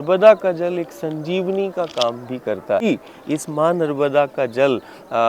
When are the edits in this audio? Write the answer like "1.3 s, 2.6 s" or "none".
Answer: 2.8 s